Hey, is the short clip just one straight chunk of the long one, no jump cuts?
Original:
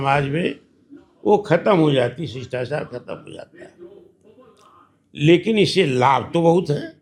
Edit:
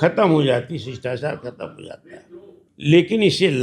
no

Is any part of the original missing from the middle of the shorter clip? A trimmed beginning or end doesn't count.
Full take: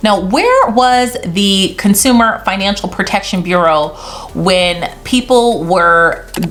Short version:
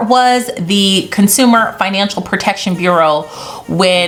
no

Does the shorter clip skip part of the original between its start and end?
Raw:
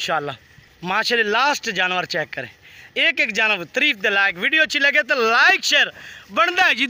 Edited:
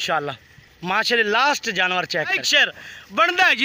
yes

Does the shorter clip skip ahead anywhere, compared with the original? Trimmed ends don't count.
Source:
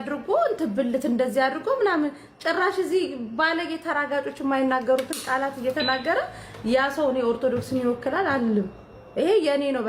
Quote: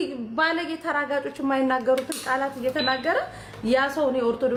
no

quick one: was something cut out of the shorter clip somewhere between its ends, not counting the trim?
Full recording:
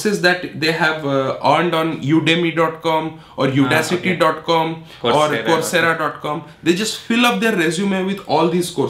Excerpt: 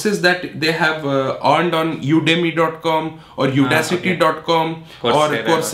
no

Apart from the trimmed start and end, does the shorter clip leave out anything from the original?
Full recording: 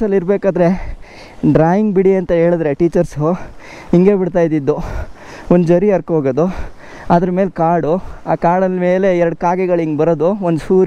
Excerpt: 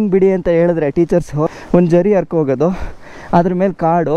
yes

